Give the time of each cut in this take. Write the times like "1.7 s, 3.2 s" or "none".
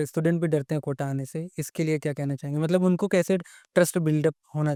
none